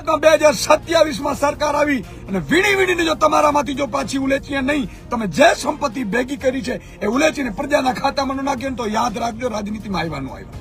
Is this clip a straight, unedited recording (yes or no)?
yes